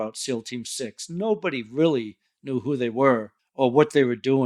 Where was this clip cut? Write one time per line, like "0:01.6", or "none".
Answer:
0:03.4